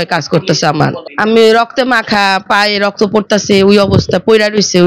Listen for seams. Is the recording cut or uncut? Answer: cut